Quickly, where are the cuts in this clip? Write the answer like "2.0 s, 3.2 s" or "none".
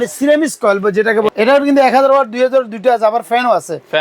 1.3 s